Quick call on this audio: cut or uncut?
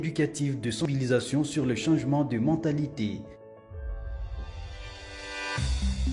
cut